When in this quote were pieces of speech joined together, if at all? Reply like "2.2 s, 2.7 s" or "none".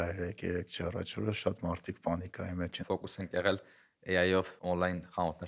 2.8 s, 4.6 s